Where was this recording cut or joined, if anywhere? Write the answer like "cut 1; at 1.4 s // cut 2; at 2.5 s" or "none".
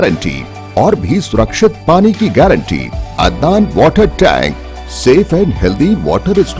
cut 1; at 3.0 s